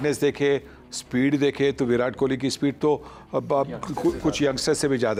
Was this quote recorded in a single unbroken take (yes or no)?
yes